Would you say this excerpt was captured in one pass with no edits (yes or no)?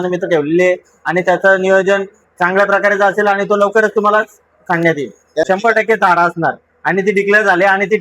no